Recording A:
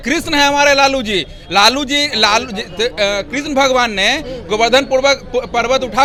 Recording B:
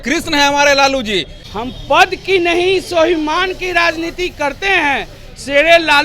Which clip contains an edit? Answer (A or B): B